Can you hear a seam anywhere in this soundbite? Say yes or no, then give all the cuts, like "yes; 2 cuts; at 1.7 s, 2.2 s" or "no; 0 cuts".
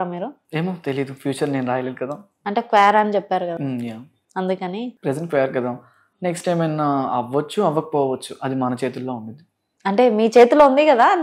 no; 0 cuts